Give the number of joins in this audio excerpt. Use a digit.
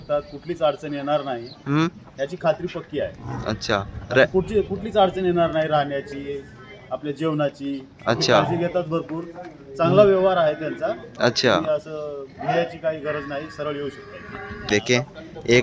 1